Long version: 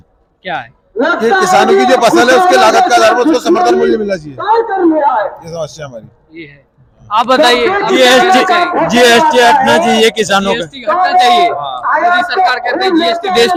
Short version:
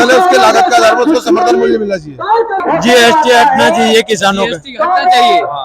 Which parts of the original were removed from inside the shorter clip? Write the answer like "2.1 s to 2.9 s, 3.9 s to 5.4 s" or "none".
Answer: 4.8 s to 8.7 s